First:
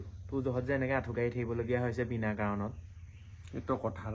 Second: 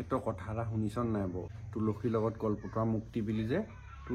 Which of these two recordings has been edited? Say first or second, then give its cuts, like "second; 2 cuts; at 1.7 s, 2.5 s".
second; 1 cut; at 1.5 s